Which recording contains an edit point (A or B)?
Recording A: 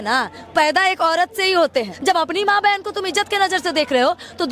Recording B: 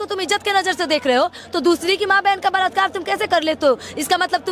A